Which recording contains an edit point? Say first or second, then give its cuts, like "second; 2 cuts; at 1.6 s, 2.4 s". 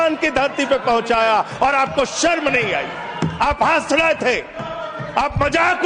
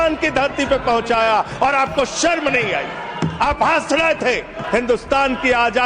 second; 1 cut; at 4.6 s